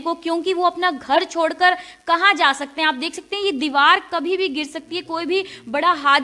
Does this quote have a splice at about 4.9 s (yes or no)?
no